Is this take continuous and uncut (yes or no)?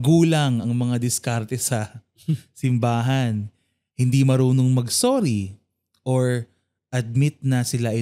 yes